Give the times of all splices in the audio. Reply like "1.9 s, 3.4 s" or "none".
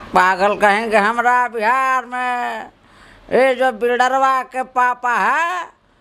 none